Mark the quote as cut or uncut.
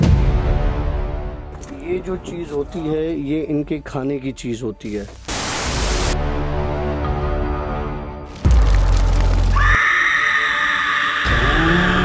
uncut